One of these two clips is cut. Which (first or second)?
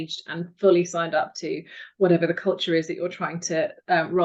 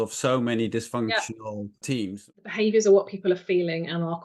second